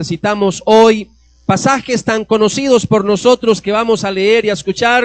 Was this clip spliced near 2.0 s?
yes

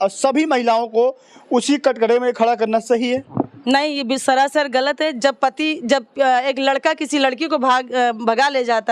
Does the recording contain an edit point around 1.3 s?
no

